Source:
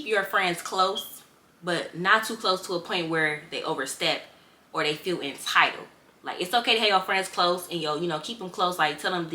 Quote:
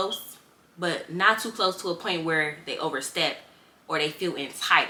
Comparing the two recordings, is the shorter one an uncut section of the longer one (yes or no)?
yes